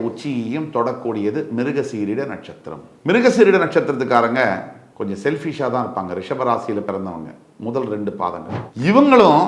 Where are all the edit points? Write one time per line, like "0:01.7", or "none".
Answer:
0:08.5

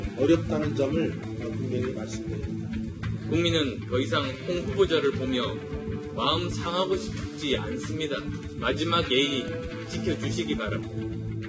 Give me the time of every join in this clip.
0:08.0

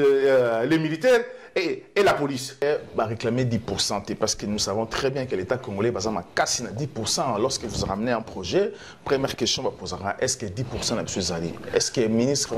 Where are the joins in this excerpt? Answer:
0:02.6

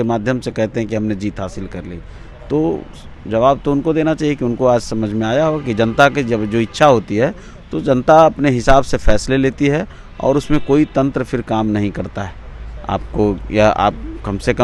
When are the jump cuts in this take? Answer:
none

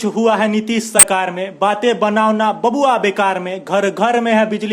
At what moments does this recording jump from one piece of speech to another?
0:01.0

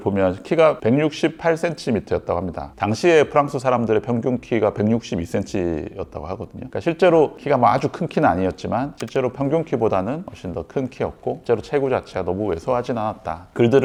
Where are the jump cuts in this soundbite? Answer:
none

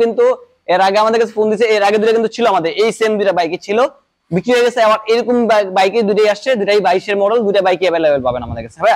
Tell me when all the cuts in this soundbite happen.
none

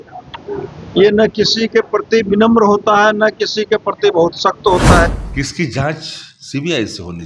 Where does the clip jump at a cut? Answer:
0:05.1

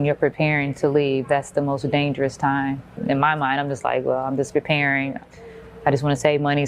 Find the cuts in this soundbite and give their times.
0:03.0

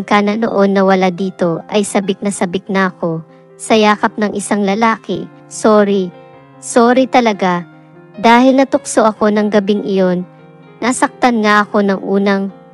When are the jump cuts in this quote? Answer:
0:05.5
0:10.5

